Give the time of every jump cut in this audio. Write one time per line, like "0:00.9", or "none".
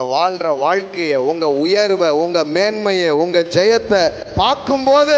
none